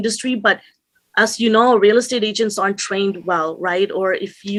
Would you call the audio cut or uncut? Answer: uncut